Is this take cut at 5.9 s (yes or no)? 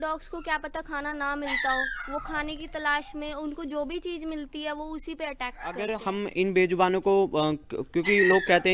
yes